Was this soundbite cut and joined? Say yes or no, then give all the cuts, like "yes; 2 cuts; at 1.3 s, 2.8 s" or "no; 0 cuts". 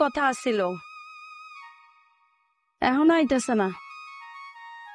yes; 1 cut; at 3.8 s